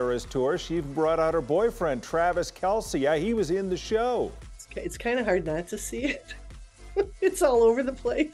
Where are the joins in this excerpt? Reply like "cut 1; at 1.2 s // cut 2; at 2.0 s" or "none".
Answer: cut 1; at 4.4 s